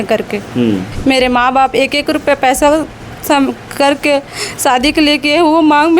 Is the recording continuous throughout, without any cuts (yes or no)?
no